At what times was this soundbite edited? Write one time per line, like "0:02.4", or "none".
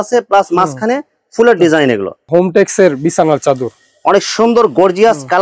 0:02.2